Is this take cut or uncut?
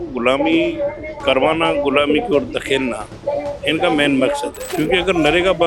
cut